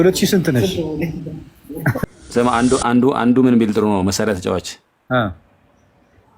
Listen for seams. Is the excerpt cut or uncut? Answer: cut